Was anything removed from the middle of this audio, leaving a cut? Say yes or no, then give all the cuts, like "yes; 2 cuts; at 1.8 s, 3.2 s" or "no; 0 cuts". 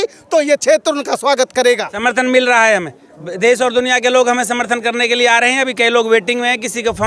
yes; 1 cut; at 1.9 s